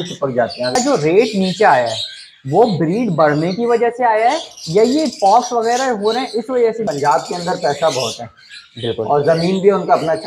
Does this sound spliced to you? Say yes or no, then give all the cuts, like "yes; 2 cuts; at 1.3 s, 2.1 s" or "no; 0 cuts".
yes; 2 cuts; at 0.8 s, 6.9 s